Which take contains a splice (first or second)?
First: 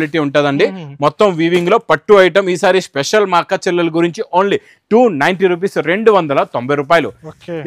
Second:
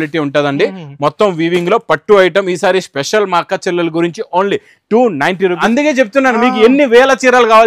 second